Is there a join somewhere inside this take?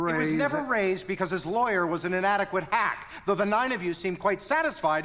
yes; 1 cut; at 3.0 s

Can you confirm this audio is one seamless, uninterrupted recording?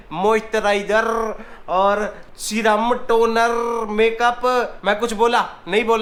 yes; 0 cuts

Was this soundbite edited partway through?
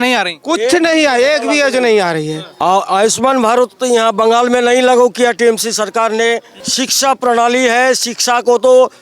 yes; 1 cut; at 6.6 s

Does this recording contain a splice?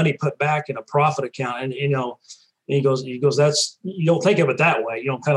no; 0 cuts

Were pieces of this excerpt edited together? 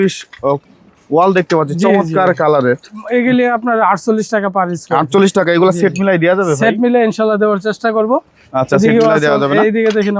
no; 0 cuts

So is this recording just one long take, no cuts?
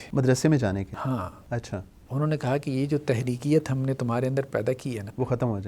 yes; 0 cuts

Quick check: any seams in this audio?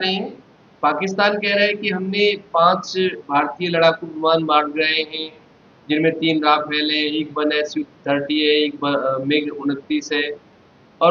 no; 0 cuts

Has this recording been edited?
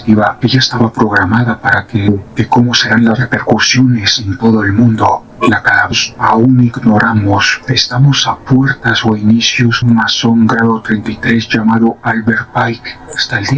yes; 3 cuts; at 2.1 s, 5.9 s, 9.8 s

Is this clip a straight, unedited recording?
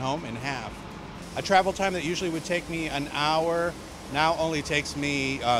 no; 1 cut; at 1.5 s

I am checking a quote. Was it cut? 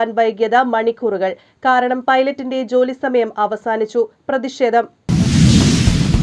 yes; 1 cut; at 5.0 s

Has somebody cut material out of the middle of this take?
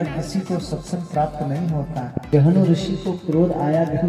yes; 1 cut; at 2.2 s

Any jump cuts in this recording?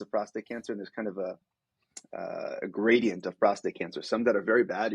no; 0 cuts

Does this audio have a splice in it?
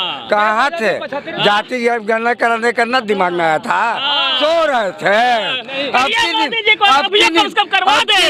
no; 0 cuts

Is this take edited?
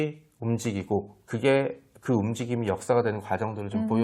no; 0 cuts

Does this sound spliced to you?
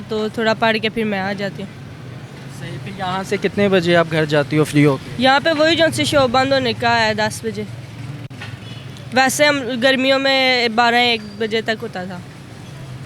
no; 0 cuts

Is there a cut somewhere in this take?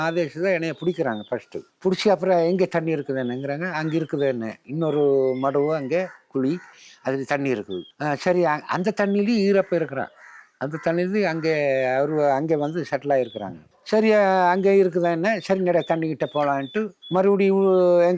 no; 0 cuts

